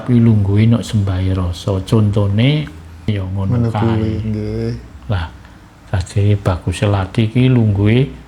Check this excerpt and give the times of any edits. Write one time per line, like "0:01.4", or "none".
0:03.1